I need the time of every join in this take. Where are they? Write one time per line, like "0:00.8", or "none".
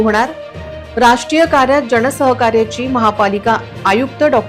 none

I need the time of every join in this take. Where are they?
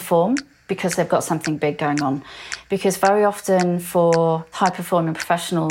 0:04.5

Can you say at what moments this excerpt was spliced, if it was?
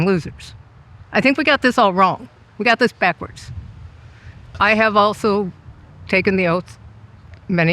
0:04.5

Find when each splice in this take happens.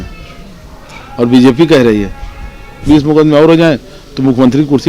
0:02.9

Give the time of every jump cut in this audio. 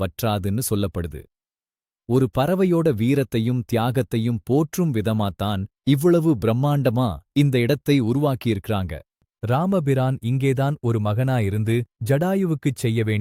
0:09.3

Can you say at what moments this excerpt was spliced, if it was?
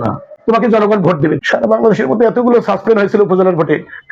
0:01.4

